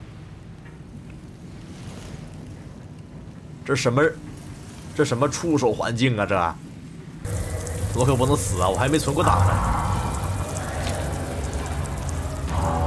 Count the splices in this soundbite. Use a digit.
1